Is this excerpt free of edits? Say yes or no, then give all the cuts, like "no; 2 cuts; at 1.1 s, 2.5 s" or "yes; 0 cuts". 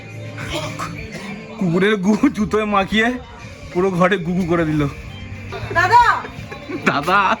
no; 1 cut; at 5.6 s